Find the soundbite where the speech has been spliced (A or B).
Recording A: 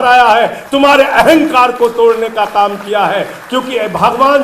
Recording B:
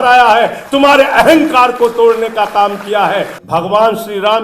B